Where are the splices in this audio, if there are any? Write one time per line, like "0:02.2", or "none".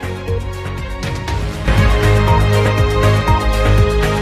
0:01.4